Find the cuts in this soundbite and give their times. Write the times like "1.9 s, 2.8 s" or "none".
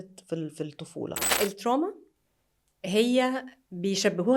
1.2 s